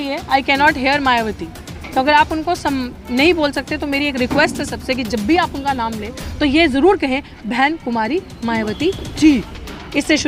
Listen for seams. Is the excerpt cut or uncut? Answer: uncut